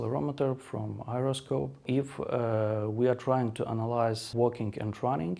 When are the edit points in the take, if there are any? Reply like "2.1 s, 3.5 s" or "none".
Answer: 1.8 s